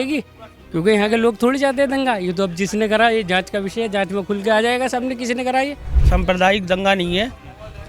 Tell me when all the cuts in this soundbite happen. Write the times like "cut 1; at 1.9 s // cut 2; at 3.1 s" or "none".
cut 1; at 6.0 s

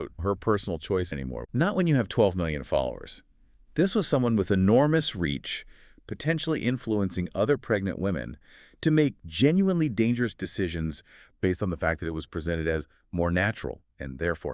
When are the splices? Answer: none

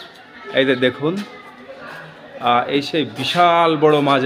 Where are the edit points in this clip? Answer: none

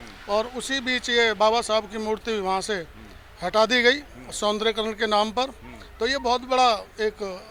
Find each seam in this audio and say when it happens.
none

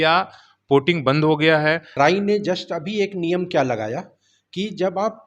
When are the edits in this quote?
cut 1; at 1.9 s

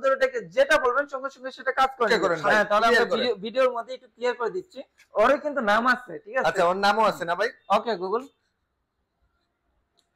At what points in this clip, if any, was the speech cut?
cut 1; at 2.1 s

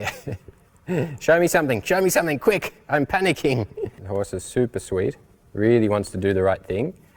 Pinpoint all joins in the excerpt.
cut 1; at 4.0 s

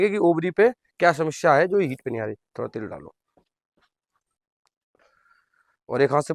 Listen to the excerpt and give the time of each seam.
none

